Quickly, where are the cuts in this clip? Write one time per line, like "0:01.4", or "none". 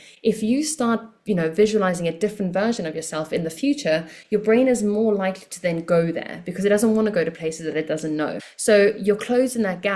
0:08.4